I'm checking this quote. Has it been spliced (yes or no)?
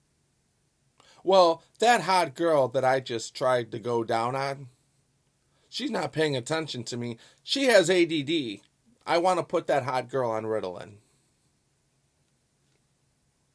no